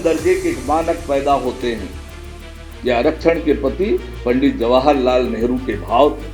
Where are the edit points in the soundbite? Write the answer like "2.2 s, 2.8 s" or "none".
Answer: none